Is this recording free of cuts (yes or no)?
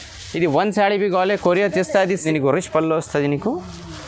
no